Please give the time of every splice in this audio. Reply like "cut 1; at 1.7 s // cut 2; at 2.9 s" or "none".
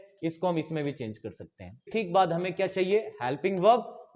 cut 1; at 1.9 s